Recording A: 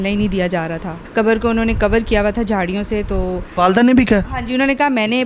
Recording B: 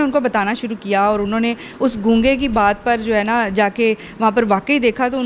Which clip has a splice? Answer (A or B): A